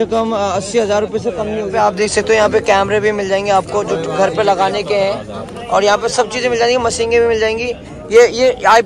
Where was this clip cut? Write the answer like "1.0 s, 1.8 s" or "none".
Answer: none

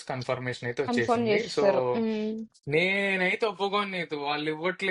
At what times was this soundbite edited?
2.5 s

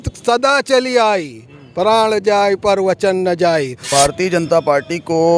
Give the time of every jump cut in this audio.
3.9 s

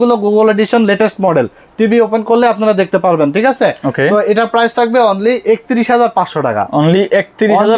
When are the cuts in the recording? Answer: none

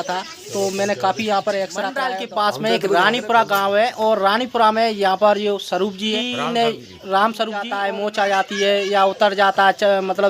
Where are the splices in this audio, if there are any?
2.0 s, 6.1 s, 7.7 s

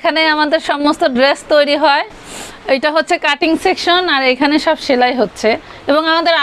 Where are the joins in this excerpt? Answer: none

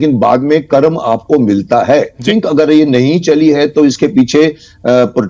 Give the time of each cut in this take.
2.2 s

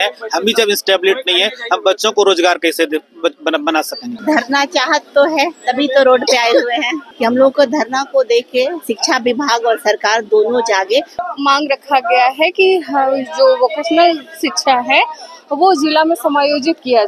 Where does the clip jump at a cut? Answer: 4.1 s, 7.0 s, 11.1 s

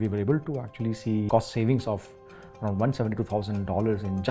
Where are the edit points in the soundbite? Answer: 1.3 s

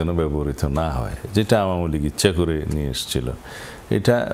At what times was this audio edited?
none

